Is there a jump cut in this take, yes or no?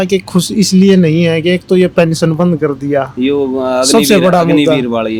no